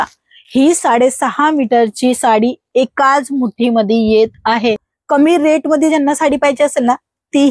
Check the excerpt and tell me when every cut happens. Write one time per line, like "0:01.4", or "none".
0:04.9